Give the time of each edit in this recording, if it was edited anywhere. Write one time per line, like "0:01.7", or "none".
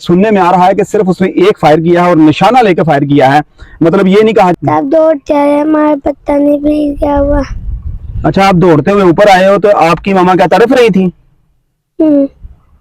0:04.5